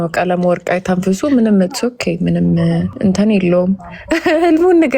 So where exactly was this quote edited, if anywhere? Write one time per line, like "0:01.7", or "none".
0:02.9